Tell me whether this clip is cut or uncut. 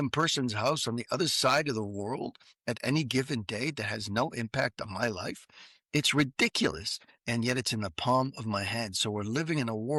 uncut